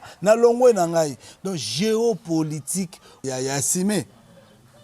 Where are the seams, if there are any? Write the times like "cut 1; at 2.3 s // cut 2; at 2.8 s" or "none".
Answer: cut 1; at 3.2 s